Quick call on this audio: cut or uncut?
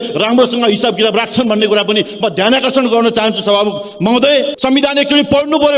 cut